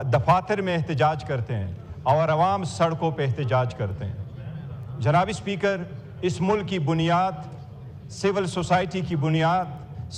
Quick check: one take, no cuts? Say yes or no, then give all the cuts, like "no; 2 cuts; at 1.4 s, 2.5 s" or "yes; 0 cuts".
yes; 0 cuts